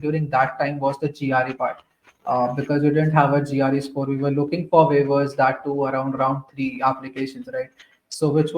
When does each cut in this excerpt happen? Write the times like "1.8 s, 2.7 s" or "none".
none